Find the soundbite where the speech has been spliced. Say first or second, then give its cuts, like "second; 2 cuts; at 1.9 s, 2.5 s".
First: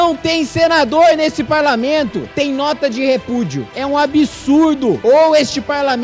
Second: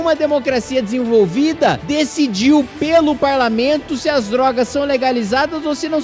first; 1 cut; at 3.7 s